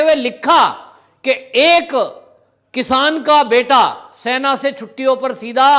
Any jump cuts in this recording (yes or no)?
no